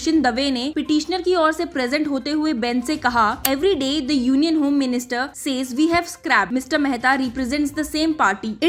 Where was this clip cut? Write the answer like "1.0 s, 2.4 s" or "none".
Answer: none